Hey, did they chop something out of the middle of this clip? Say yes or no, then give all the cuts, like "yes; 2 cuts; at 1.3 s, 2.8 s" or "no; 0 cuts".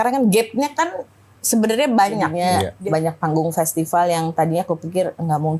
yes; 1 cut; at 2.3 s